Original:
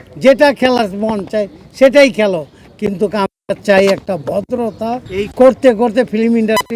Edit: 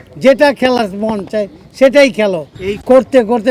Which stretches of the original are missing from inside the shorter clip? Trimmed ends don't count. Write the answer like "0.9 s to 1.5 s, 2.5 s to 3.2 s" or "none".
2.6 s to 5.1 s